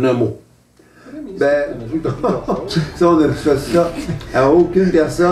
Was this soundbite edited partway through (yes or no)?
yes